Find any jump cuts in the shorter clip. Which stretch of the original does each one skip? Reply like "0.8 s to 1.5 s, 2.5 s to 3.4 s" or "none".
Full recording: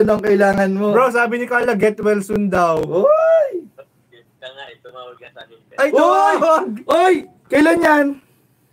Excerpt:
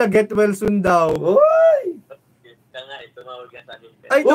none